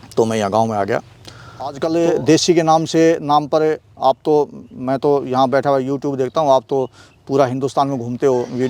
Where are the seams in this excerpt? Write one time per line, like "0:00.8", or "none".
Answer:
0:01.1